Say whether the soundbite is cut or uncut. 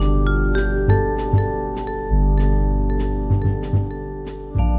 uncut